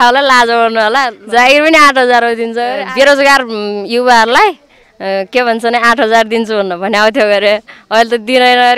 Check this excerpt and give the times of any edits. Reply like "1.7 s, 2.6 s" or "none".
1.2 s, 2.8 s